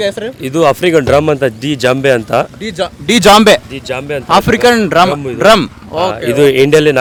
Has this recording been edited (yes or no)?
no